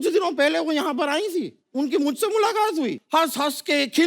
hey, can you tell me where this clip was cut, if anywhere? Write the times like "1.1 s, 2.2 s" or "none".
1.6 s, 3.0 s